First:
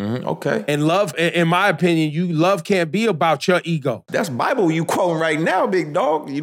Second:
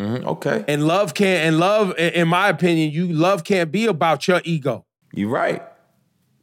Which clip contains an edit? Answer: first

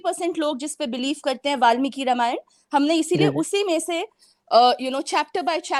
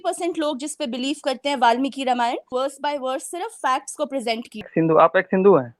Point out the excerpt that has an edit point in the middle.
second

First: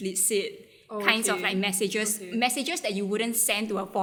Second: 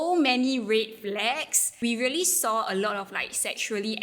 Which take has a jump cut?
second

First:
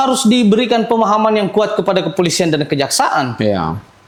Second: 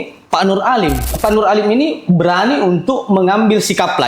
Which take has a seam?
second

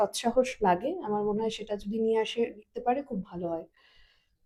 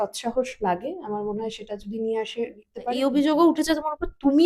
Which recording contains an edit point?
second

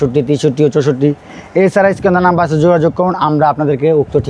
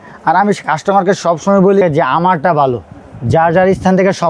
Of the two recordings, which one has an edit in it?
second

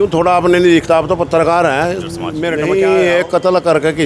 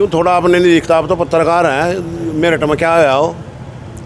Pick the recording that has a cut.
first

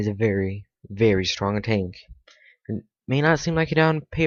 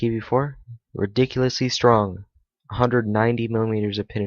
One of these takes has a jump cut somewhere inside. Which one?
second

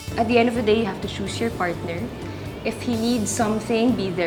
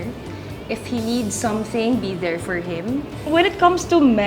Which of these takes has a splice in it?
second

